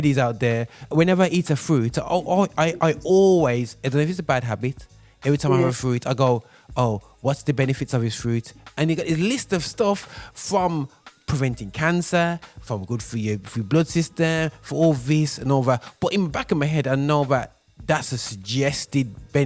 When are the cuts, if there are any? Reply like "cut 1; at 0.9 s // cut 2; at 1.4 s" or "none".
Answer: cut 1; at 0.9 s